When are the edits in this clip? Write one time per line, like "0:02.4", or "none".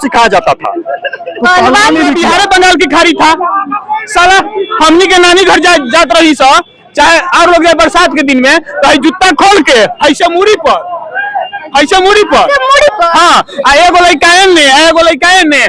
0:02.2